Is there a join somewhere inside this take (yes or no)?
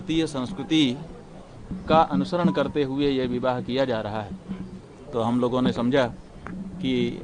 no